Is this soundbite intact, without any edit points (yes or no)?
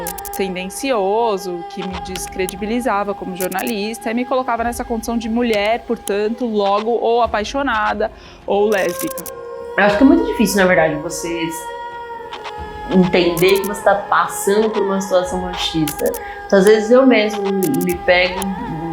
no